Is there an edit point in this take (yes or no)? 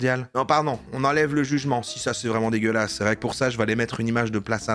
no